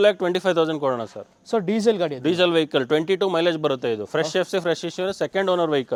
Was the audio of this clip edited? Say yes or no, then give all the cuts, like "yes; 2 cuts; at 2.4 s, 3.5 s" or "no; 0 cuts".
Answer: no; 0 cuts